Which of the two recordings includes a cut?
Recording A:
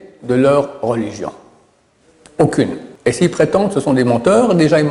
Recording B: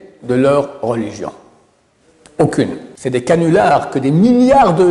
B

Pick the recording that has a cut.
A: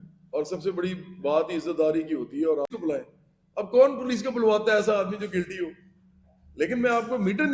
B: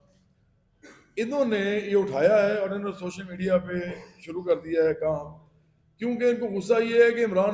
A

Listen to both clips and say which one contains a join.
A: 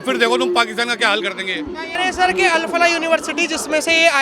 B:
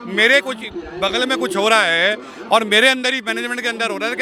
A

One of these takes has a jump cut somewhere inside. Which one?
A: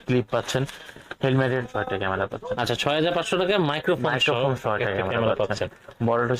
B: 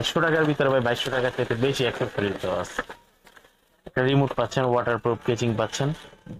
A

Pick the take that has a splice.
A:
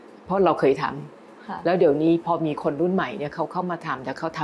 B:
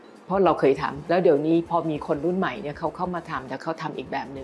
B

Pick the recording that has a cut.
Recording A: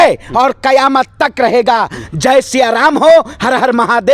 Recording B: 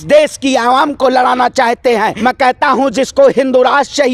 B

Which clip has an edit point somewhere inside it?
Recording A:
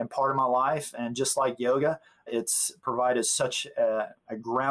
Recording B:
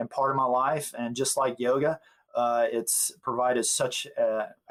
A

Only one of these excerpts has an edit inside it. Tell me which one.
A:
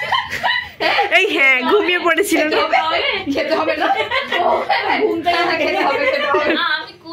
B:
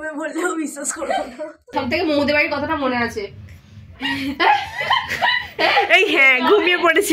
B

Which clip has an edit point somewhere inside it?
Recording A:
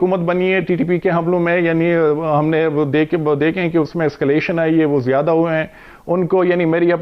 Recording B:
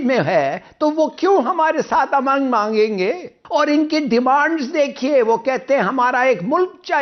B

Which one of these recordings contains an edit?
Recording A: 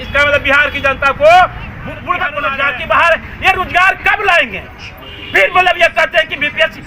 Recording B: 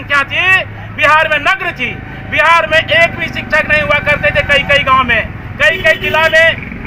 A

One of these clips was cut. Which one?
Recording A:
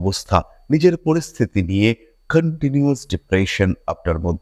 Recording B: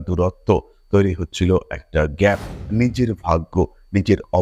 B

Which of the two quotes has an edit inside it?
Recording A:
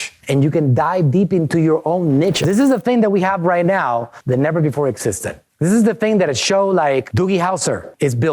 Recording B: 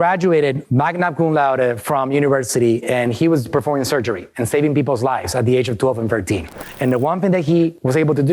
A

